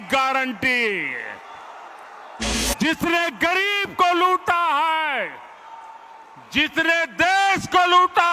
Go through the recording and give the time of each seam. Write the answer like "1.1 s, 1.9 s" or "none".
2.6 s

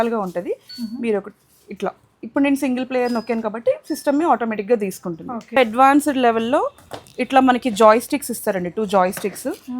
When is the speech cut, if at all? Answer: 5.6 s

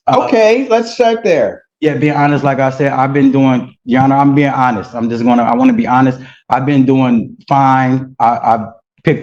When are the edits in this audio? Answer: none

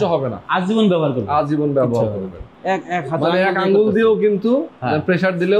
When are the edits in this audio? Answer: 2.5 s

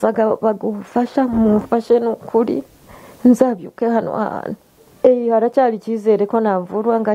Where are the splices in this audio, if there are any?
4.8 s

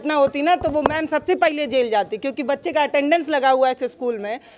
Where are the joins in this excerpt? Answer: none

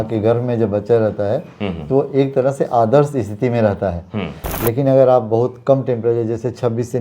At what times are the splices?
4.4 s

